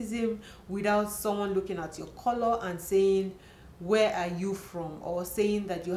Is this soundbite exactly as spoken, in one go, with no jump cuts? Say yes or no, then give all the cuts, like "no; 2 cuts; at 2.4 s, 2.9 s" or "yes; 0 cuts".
yes; 0 cuts